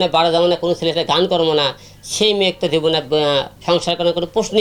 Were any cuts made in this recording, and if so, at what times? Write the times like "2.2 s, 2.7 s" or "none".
none